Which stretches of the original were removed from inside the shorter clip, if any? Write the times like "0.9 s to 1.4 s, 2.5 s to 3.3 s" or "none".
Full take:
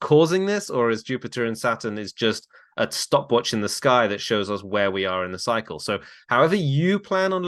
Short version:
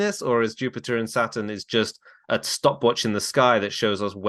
none